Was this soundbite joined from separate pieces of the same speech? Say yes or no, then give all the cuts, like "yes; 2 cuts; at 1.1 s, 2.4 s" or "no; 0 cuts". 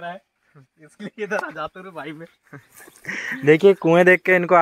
no; 0 cuts